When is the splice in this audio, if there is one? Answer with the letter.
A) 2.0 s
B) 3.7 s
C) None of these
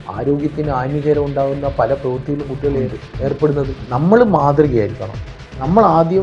B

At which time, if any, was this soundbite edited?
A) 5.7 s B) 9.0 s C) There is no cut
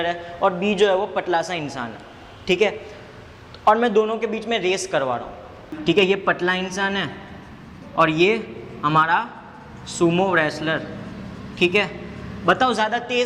A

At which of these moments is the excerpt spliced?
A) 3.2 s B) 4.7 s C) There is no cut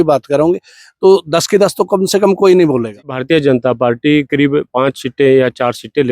A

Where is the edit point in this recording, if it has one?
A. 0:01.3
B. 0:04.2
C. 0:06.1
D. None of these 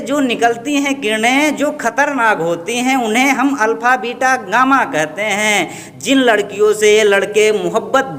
D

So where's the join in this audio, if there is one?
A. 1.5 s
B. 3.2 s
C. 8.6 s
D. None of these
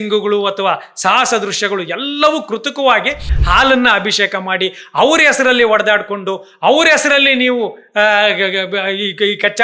B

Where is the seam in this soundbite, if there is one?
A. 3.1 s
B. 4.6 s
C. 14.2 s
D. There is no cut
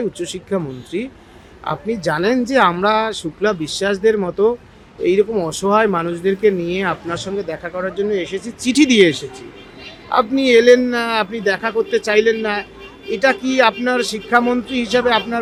D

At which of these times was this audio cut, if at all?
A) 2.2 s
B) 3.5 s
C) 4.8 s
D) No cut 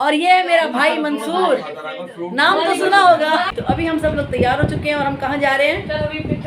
B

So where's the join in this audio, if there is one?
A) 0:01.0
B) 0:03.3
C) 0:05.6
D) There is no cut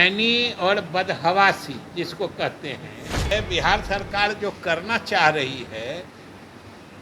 B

